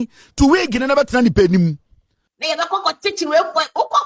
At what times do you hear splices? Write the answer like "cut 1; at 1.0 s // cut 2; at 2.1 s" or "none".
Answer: none